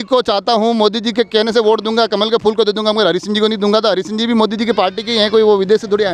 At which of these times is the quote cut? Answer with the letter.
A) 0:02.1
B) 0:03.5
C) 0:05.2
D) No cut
D